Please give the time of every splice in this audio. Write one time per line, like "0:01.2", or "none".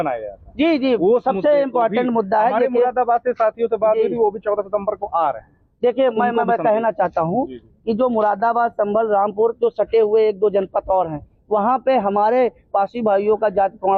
none